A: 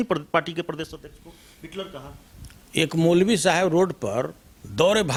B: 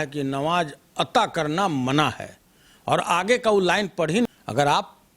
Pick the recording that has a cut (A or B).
B